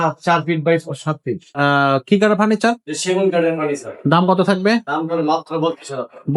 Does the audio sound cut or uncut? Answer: cut